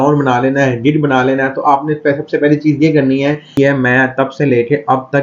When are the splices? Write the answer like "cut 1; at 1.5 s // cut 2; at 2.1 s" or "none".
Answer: cut 1; at 3.5 s

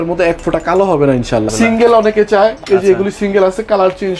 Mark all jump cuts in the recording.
cut 1; at 1.5 s

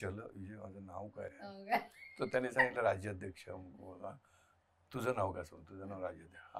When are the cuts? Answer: none

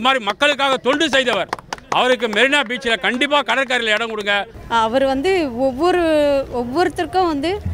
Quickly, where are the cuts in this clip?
cut 1; at 4.6 s

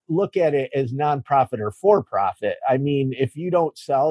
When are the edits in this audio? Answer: none

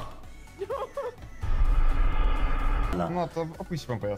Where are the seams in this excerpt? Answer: cut 1; at 2.9 s

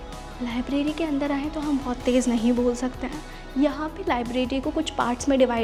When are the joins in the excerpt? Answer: none

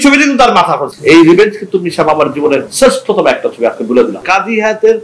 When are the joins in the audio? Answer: cut 1; at 1.0 s // cut 2; at 4.2 s

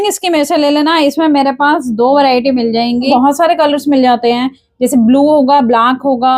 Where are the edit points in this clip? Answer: cut 1; at 3.1 s

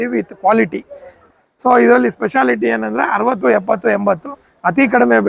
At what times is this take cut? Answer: cut 1; at 1.2 s

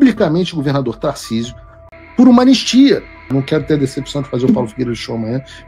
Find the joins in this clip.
cut 1; at 1.8 s // cut 2; at 3.3 s

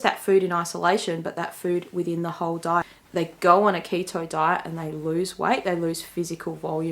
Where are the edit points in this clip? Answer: cut 1; at 3.0 s

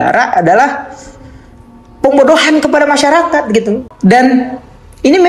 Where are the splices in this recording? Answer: cut 1; at 3.9 s

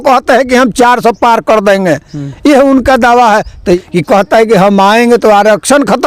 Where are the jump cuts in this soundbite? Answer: cut 1; at 3.8 s

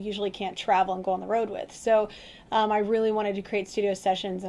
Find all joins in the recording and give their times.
none

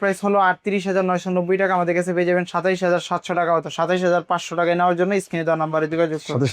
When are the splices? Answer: none

